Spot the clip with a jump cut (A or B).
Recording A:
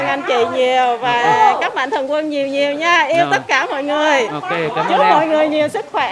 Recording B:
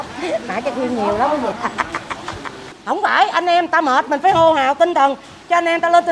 B